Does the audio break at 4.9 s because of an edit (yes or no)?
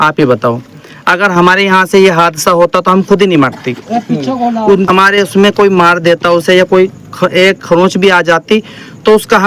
yes